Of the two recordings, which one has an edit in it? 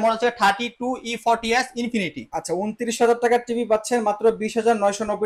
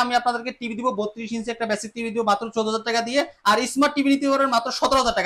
first; 1 cut; at 2.3 s

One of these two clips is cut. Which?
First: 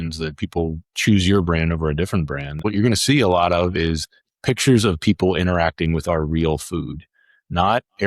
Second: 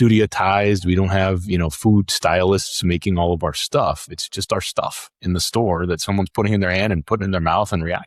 first; 1 cut; at 2.5 s

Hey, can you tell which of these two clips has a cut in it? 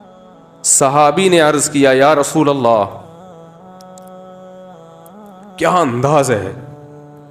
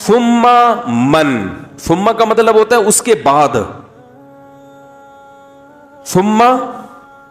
first; 4 cuts; at 0.8 s, 3.1 s, 5.6 s, 6.6 s

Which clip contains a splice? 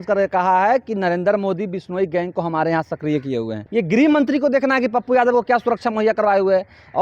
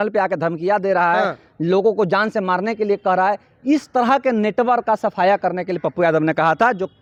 first; 1 cut; at 3.6 s

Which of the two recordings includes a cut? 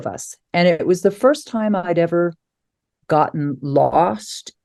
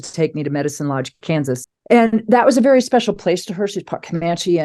second; 1 cut; at 1.7 s

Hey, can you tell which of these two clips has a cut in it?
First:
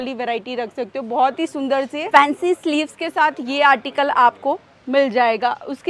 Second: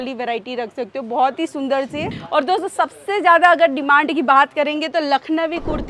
second; 1 cut; at 2.1 s

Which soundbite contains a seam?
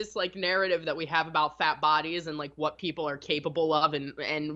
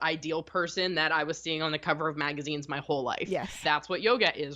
second; 1 cut; at 3.6 s

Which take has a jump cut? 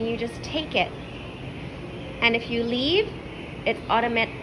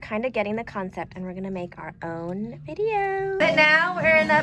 second; 1 cut; at 3.4 s

